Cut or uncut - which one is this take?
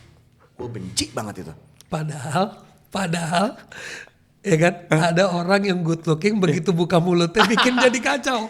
uncut